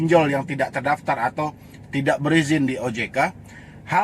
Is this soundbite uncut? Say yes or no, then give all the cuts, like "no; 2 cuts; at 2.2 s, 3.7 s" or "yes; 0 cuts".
yes; 0 cuts